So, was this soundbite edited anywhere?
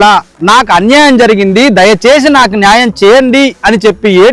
no; 0 cuts

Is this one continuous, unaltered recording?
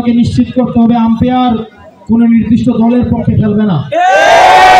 yes; 0 cuts

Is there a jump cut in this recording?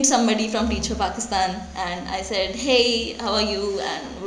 no; 0 cuts

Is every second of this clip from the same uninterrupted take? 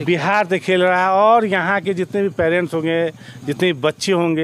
yes; 0 cuts

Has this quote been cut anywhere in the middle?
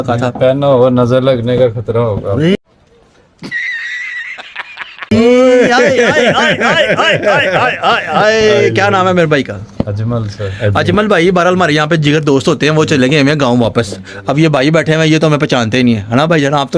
no; 0 cuts

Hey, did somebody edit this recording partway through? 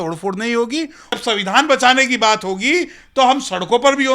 yes; 1 cut; at 1.0 s

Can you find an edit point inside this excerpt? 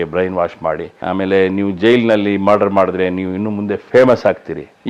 yes; 1 cut; at 0.9 s

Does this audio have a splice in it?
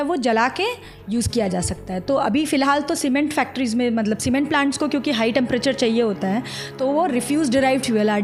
no; 0 cuts

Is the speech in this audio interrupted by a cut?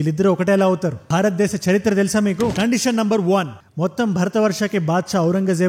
yes; 1 cut; at 2.5 s

